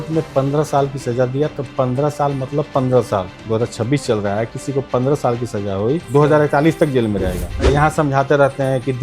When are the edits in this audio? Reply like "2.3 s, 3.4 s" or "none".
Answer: 3.4 s, 6.0 s, 7.5 s